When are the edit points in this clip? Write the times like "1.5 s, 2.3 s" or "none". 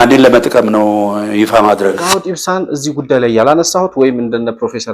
2.2 s